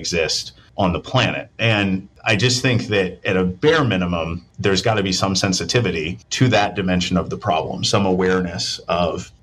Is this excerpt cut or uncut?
uncut